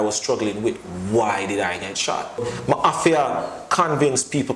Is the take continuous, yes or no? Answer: no